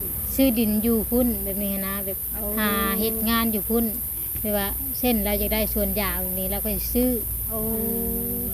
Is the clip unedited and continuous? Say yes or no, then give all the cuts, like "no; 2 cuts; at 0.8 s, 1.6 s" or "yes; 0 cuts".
yes; 0 cuts